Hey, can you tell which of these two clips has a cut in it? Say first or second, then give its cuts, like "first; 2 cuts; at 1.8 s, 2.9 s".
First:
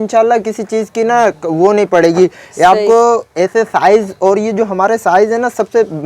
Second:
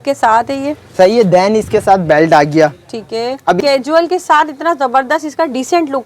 second; 1 cut; at 3.6 s